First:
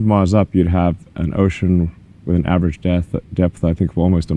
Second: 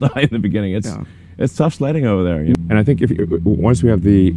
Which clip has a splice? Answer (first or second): second